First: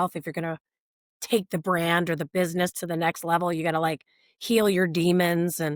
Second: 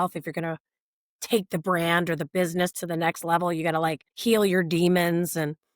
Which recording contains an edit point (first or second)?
second